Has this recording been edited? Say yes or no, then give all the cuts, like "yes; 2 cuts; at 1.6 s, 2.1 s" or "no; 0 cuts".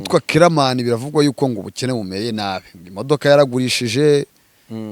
no; 0 cuts